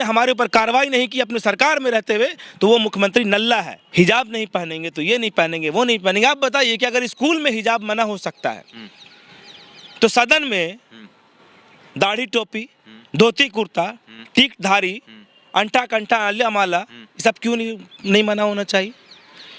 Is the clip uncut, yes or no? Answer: no